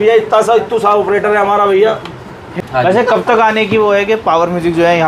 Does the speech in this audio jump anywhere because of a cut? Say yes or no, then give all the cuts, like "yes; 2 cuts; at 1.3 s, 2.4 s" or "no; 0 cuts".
yes; 1 cut; at 2.6 s